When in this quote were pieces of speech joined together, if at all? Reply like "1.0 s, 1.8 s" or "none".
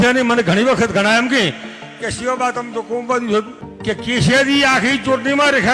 3.6 s